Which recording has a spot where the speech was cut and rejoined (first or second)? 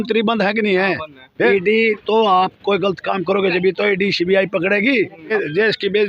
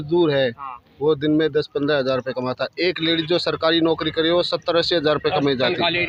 first